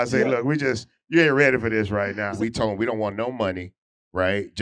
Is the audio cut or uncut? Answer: cut